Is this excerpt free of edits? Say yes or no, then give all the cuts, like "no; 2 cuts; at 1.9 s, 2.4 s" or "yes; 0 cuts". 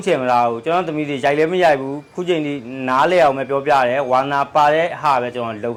yes; 0 cuts